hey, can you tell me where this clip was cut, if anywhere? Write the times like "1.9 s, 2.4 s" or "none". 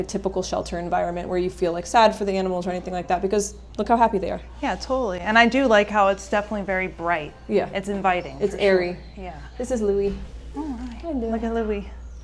none